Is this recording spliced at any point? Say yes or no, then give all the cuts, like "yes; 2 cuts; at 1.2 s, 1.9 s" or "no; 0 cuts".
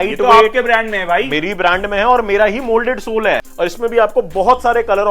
yes; 1 cut; at 3.5 s